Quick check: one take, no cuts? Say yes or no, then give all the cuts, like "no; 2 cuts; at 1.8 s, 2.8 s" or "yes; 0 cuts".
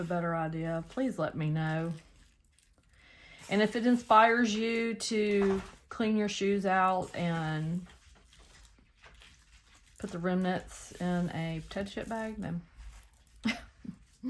yes; 0 cuts